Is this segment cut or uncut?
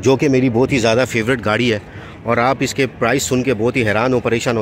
uncut